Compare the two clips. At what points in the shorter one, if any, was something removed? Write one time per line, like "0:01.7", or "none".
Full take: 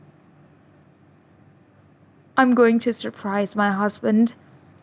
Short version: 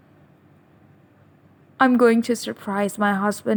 none